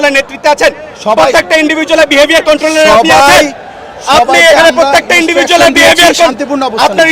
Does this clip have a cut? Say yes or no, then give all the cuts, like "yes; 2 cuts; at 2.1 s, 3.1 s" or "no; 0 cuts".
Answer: no; 0 cuts